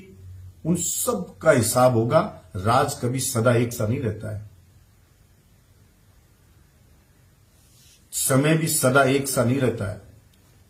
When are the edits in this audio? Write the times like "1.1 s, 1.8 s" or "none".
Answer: none